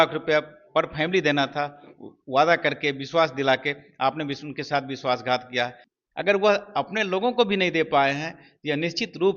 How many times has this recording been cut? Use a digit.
1